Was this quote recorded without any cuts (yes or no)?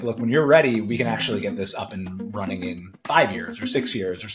yes